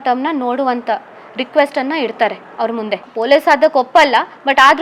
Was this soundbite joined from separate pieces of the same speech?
no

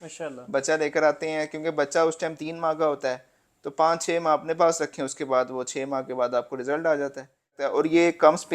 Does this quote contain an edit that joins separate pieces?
yes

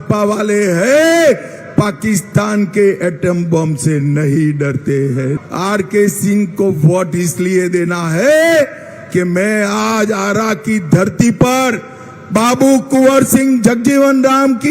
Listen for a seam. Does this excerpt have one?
yes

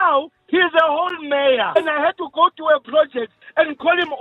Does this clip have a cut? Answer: yes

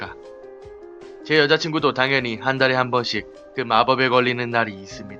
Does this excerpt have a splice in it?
yes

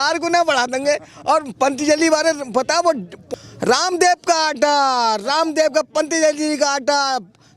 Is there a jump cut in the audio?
no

